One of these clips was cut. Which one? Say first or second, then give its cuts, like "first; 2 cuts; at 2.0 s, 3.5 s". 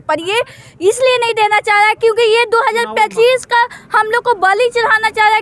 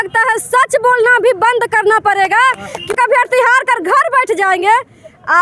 second; 1 cut; at 2.9 s